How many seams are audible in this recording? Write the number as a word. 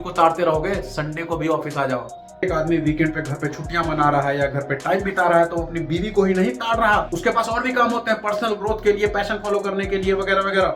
one